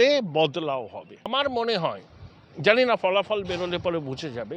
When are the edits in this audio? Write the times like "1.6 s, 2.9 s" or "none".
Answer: 1.3 s

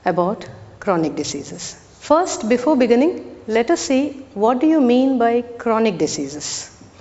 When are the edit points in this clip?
none

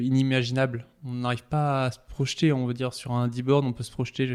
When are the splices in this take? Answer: none

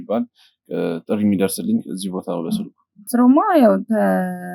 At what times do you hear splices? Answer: 3.0 s

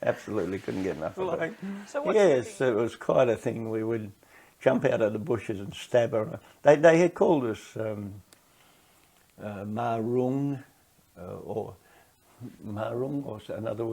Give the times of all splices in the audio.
1.5 s

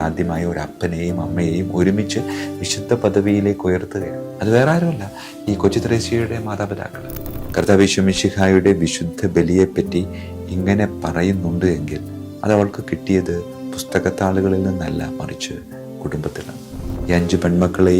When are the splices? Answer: 7.4 s

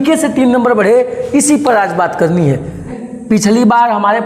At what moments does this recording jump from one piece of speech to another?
none

